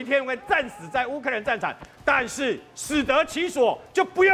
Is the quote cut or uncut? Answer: uncut